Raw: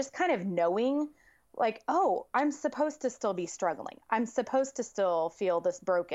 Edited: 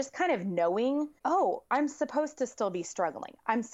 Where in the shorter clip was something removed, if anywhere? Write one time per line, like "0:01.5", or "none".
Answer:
0:01.2

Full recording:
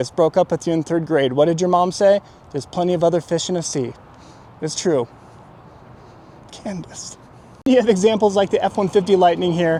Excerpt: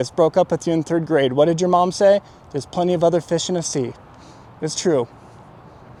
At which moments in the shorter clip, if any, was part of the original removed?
none

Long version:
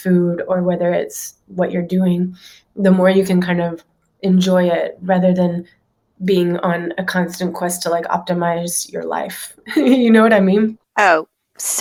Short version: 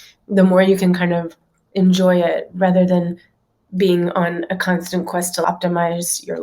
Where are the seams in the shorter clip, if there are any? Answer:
0:05.4

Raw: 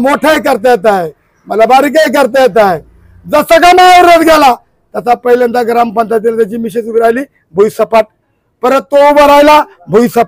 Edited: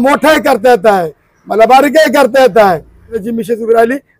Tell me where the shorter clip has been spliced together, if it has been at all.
0:03.2

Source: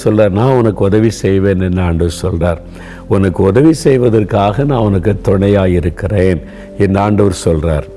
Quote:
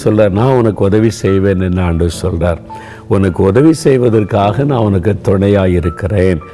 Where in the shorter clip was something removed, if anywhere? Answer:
none

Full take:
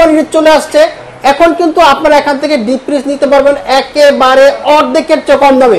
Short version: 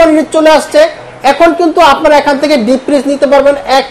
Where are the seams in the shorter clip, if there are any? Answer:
none

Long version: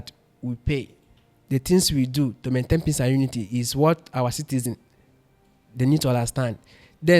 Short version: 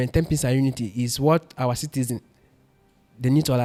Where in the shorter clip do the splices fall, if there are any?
none

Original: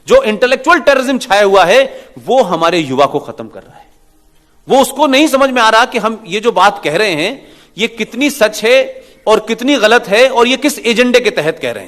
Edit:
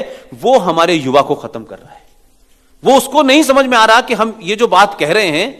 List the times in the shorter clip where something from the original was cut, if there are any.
none

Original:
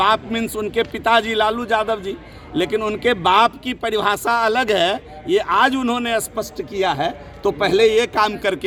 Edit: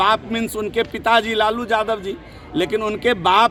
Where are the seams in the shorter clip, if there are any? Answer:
none

